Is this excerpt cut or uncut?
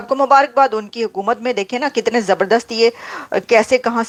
uncut